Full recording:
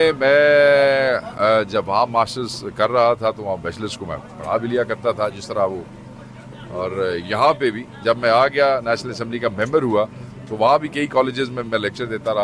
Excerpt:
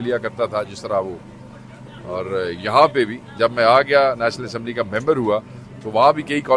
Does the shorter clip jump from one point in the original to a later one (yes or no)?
no